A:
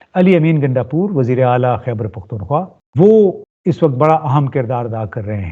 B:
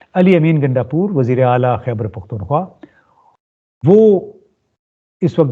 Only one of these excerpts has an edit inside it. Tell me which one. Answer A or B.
A